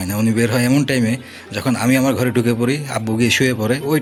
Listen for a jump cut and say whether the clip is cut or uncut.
uncut